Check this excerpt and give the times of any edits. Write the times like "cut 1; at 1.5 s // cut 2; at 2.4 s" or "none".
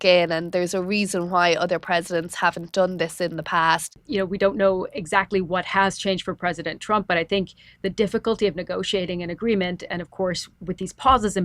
cut 1; at 4.0 s

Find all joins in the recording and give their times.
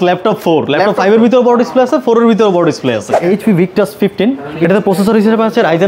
cut 1; at 3.1 s

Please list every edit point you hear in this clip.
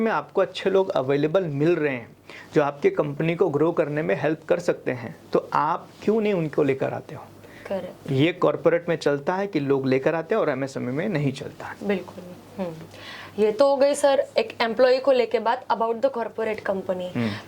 none

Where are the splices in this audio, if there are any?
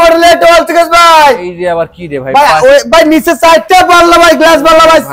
none

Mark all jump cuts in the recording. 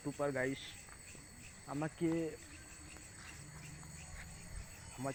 none

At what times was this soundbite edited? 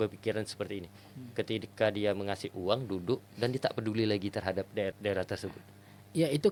none

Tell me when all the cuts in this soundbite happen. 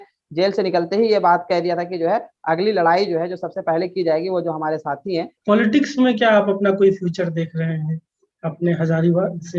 cut 1; at 5.3 s

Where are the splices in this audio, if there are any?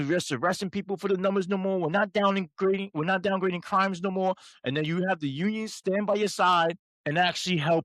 cut 1; at 6.9 s

